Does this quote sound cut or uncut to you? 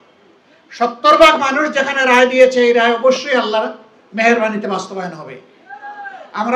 uncut